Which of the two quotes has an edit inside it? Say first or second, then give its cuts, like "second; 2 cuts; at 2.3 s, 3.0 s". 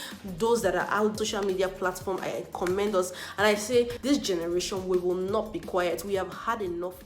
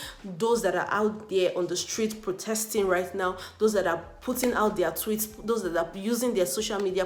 first; 2 cuts; at 1.2 s, 4.0 s